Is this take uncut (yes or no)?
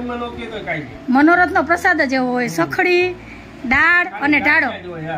yes